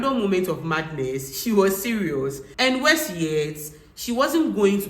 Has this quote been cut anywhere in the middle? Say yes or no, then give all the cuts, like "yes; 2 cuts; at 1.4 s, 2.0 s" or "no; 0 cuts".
no; 0 cuts